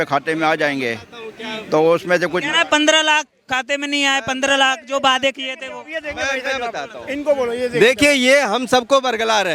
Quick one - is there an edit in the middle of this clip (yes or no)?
no